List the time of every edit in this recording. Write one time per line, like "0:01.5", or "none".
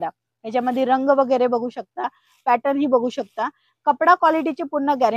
none